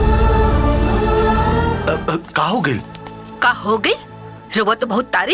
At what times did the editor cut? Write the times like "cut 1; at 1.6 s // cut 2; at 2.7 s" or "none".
none